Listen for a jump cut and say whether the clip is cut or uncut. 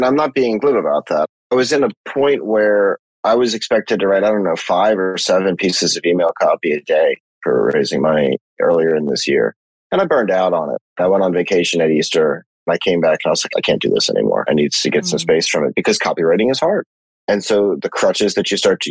uncut